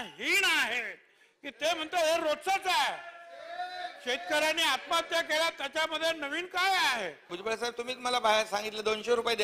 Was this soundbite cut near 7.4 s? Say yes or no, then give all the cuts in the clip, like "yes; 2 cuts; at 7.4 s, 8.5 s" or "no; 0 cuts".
yes; 1 cut; at 7.4 s